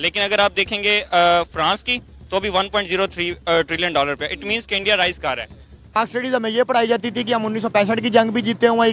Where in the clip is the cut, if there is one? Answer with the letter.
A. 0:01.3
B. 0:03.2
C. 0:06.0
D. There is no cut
C